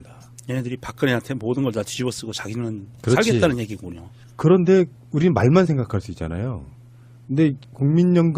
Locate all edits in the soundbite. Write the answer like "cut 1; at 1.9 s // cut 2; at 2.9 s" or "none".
cut 1; at 5.8 s